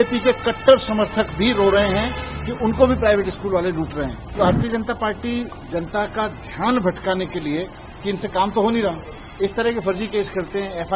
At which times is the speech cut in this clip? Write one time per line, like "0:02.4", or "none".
0:04.3